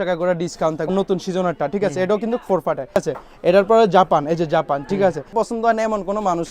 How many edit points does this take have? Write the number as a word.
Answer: three